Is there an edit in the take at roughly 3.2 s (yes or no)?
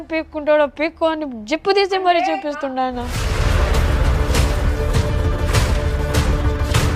yes